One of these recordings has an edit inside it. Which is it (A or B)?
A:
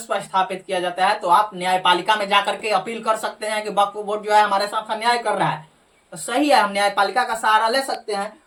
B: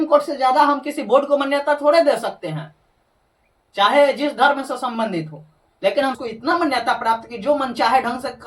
B